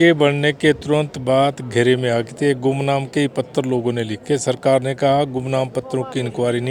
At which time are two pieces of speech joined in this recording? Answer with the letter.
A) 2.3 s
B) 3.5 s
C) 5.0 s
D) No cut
D